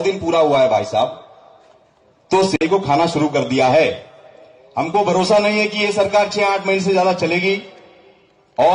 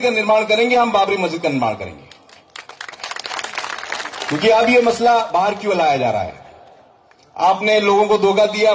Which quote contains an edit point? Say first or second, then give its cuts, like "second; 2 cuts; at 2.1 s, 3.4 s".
first; 1 cut; at 2.6 s